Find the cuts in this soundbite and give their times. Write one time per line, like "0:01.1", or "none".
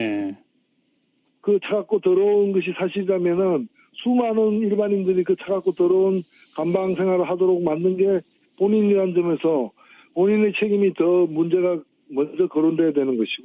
0:10.4